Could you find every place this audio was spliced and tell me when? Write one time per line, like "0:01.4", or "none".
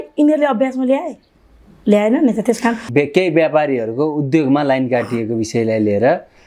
0:02.8